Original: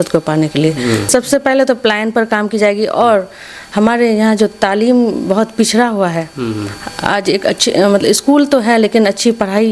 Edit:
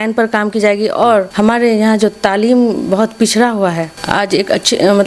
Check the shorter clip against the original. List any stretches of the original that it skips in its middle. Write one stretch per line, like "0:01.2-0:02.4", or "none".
0:03.3-0:03.7
0:06.3-0:06.9